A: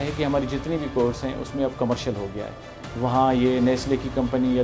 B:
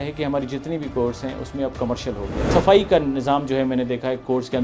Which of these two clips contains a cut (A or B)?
B